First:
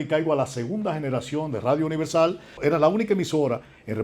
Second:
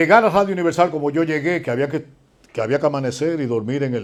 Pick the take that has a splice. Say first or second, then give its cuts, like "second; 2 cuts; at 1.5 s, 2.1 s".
first; 1 cut; at 2.5 s